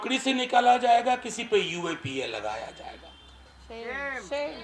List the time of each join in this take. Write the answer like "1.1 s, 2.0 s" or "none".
none